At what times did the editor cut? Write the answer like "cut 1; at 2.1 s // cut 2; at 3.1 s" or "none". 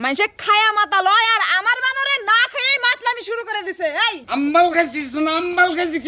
cut 1; at 4.2 s